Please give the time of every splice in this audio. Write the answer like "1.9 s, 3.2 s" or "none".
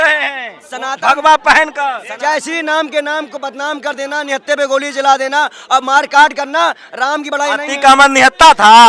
2.1 s

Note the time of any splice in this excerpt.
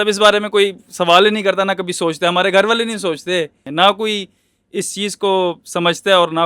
3.6 s

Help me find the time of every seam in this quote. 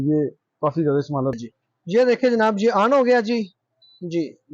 1.4 s

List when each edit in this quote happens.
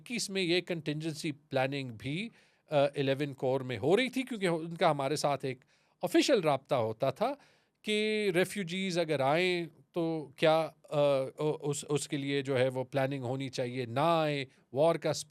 none

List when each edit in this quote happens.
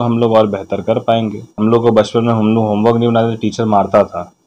1.4 s

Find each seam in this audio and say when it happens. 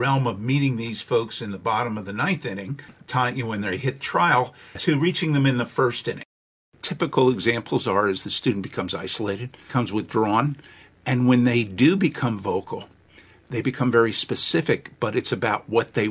2.9 s, 4.8 s, 6.4 s, 9.6 s, 13.4 s

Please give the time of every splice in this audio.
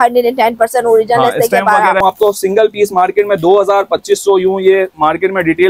2.0 s

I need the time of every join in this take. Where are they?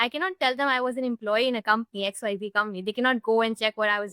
none

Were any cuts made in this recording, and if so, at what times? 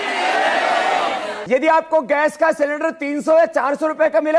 1.3 s

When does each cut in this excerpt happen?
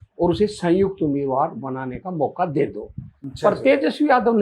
none

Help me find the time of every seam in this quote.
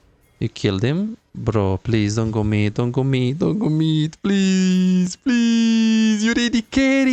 none

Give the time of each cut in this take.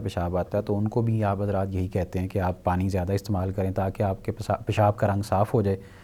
none

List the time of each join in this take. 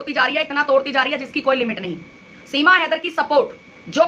none

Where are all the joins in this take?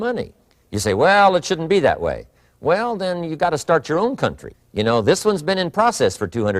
none

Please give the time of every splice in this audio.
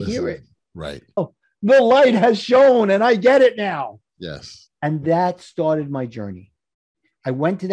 1.3 s

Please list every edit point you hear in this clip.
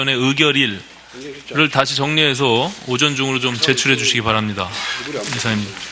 2.8 s

